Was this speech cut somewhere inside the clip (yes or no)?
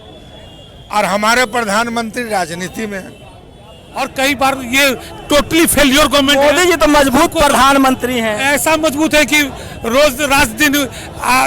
yes